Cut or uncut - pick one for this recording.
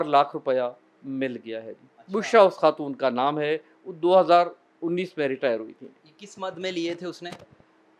uncut